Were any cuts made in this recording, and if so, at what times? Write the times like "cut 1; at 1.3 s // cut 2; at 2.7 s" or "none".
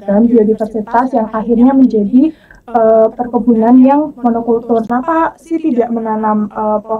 cut 1; at 4.9 s